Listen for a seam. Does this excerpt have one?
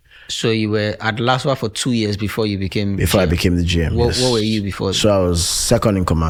no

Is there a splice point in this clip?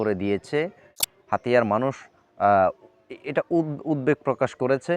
yes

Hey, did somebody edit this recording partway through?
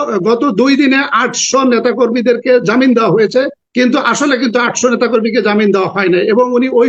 yes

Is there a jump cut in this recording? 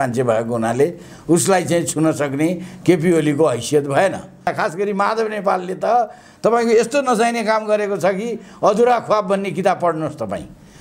yes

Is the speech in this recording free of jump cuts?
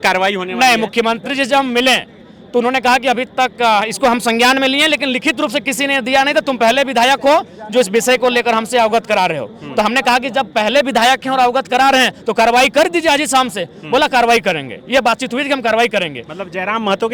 yes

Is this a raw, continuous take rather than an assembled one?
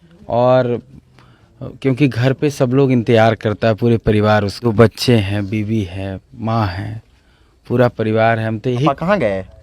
no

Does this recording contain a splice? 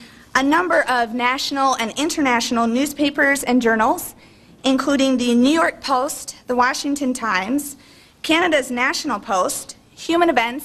yes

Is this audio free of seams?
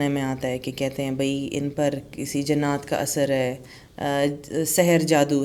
yes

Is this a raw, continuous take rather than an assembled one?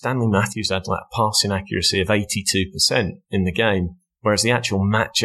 yes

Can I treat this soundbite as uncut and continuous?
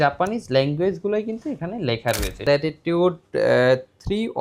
no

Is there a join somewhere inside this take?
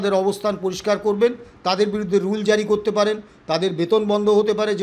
no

